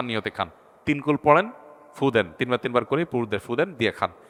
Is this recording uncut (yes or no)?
yes